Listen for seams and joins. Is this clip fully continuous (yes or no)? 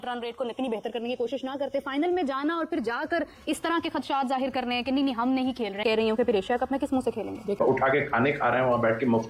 yes